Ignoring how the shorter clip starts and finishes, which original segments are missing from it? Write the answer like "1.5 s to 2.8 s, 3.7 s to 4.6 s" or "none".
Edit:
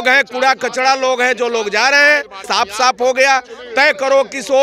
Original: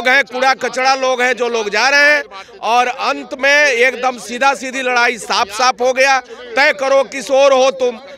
2.4 s to 5.2 s

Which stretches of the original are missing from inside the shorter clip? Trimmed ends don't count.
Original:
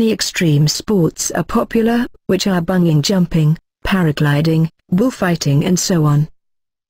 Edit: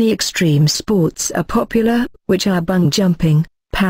2.9 s to 3.0 s

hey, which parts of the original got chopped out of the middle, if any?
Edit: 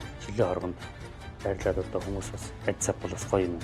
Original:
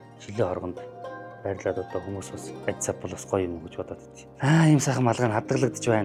none

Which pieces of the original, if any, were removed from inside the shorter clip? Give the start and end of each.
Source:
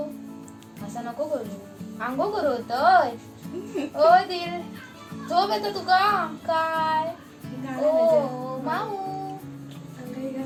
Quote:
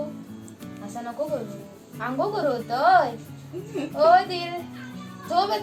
none

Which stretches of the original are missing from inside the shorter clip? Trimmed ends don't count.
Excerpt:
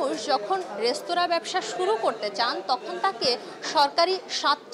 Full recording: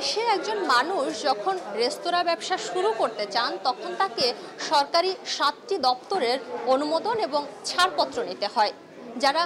none

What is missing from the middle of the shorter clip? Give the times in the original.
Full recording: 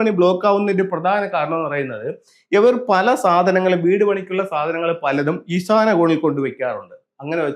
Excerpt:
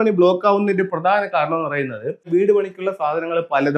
2.3 s to 3.8 s

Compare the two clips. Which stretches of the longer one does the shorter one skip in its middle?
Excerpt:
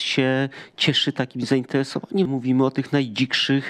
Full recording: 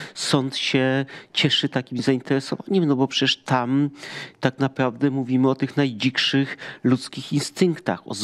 2.8 s to 5.1 s

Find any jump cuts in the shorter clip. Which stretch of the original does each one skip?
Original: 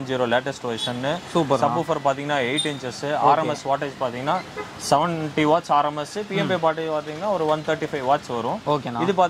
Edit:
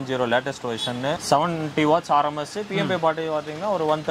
1.2 s to 4.8 s

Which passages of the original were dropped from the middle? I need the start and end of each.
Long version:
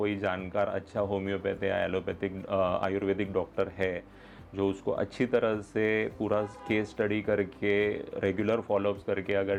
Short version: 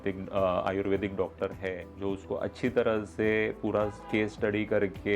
4.0 s to 4.4 s

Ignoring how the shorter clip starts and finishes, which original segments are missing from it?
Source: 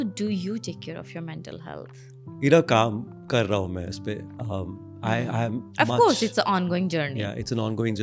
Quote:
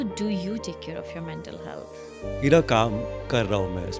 none

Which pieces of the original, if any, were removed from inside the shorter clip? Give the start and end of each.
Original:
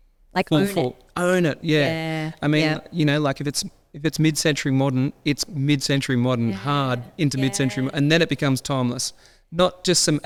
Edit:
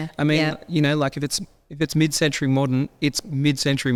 none

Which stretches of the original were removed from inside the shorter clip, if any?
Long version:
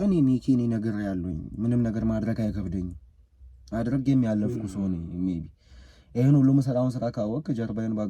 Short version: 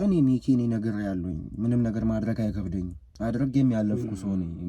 3.0 s to 3.5 s

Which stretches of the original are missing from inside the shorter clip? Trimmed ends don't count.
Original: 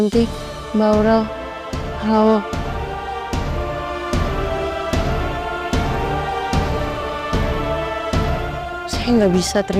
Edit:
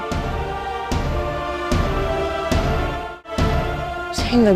5.6 s to 8.0 s

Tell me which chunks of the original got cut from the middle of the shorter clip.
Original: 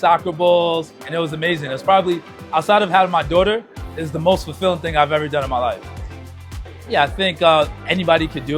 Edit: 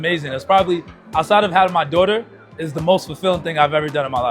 none

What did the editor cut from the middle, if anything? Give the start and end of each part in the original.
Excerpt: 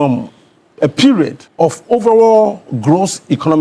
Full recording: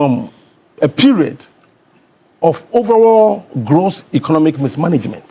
1.4 s to 2.2 s

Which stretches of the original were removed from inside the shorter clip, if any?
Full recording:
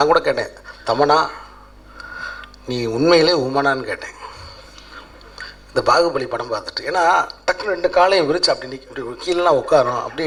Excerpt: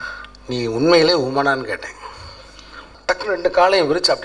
5.1 s to 7.3 s

